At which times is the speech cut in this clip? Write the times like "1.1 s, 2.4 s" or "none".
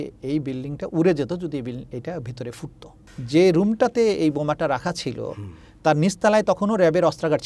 3.1 s

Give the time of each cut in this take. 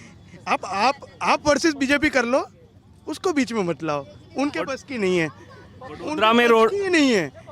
none

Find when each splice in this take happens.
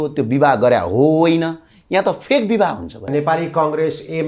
3.1 s

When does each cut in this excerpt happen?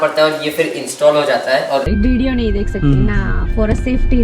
1.9 s

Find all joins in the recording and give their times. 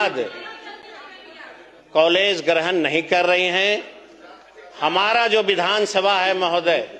none

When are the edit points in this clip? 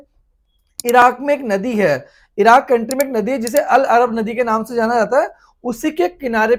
none

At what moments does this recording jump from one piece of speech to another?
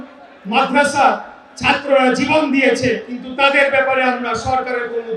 none

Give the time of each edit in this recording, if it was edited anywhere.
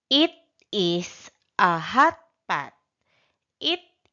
2.3 s

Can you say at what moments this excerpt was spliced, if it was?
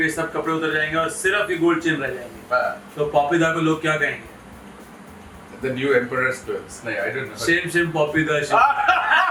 none

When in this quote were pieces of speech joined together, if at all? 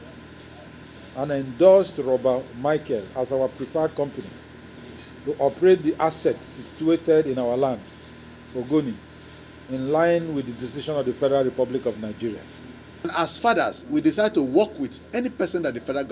13.1 s

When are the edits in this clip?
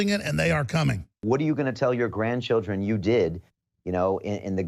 1.2 s

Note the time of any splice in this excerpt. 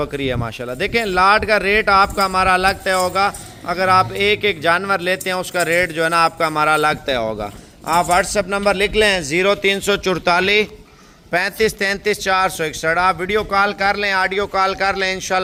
none

